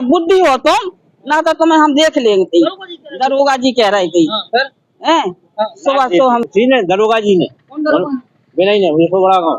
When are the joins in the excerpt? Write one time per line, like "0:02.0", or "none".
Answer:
0:06.4